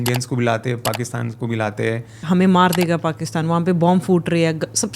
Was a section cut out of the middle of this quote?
yes; 1 cut; at 2.2 s

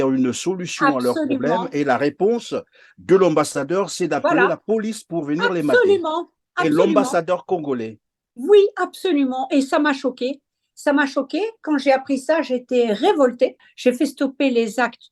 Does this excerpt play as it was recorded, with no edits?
no; 1 cut; at 13.7 s

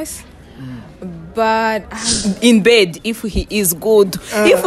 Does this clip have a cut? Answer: yes; 1 cut; at 2.1 s

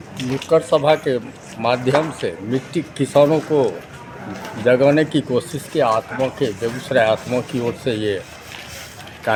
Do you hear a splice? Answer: no; 0 cuts

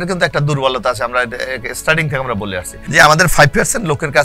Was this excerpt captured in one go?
no; 1 cut; at 2.8 s

